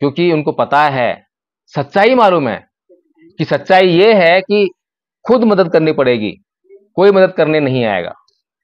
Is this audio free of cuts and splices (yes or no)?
yes